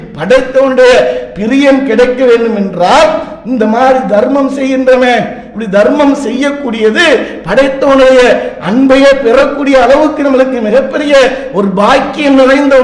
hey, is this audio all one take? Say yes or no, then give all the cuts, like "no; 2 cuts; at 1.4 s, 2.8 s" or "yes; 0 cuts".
yes; 0 cuts